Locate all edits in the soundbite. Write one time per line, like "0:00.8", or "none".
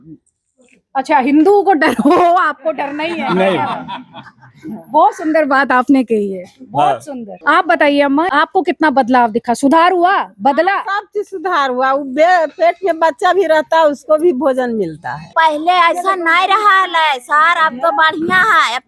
0:07.4
0:08.3
0:15.3